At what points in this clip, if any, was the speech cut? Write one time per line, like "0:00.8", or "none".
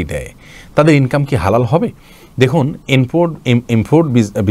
none

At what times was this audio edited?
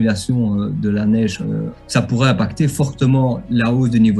0:01.8

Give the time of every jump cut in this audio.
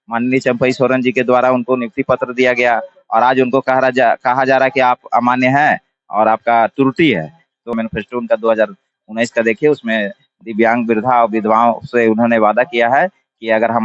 0:07.7

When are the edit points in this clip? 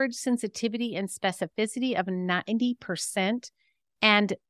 none

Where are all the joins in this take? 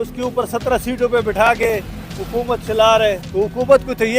0:03.2

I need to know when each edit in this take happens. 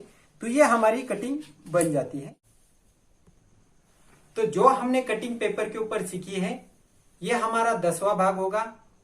0:02.3

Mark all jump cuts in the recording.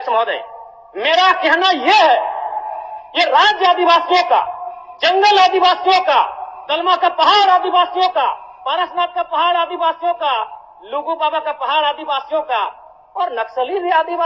none

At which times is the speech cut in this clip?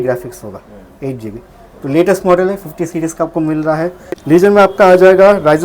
0:04.1

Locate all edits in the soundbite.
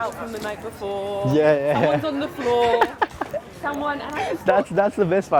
none

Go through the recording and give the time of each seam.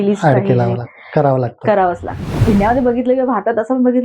0:02.3

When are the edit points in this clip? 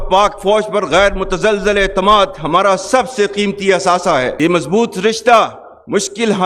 none

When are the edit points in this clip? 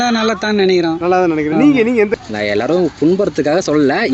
0:02.1

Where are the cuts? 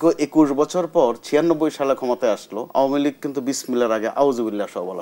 0:02.6

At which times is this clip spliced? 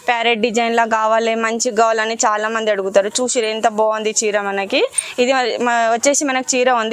none

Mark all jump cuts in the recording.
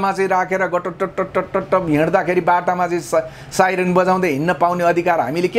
none

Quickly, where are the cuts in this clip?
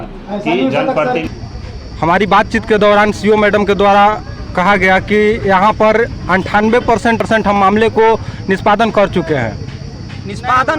0:01.3
0:07.2

